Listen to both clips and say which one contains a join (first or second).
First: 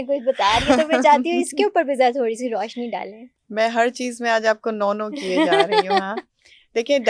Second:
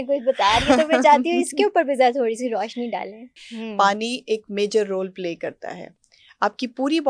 second